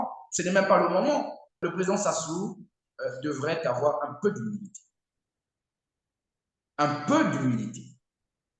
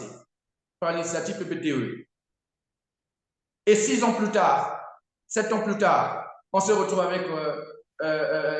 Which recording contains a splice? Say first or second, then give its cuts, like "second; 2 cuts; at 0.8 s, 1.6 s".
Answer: first; 1 cut; at 1.6 s